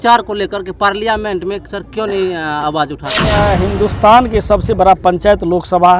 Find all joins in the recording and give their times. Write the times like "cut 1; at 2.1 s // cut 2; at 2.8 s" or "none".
cut 1; at 3.3 s